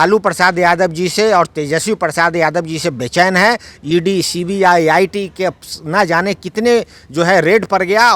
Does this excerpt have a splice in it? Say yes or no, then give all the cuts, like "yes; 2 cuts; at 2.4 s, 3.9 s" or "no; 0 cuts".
no; 0 cuts